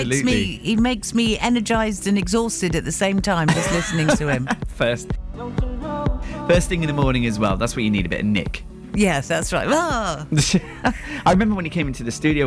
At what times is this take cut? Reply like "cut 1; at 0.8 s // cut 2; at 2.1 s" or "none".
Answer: none